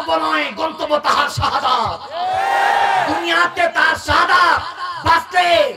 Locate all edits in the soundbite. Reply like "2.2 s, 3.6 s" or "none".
none